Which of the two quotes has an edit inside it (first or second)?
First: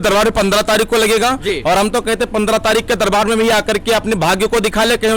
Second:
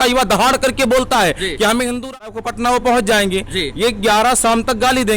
second